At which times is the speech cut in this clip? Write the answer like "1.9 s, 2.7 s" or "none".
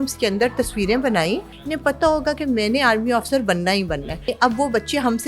1.6 s, 4.3 s

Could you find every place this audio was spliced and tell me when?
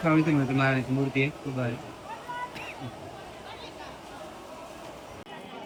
none

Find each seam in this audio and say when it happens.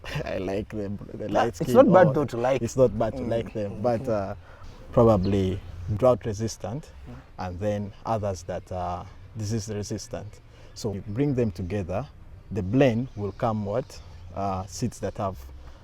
4.6 s, 10.9 s

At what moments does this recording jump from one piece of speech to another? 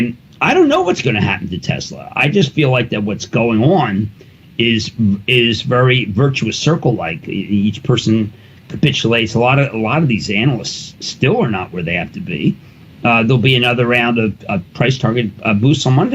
12.6 s

